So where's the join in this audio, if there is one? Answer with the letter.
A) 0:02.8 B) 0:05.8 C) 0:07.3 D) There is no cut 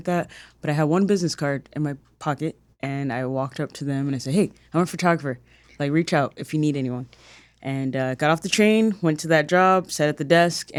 D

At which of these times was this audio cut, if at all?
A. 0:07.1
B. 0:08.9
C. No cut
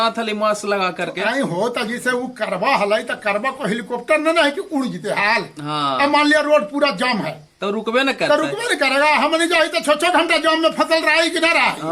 C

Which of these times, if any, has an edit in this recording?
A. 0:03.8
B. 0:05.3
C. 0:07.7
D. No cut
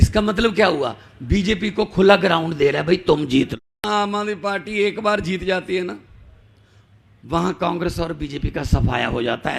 A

